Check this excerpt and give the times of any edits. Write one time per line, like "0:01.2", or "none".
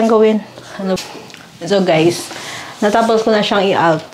0:01.0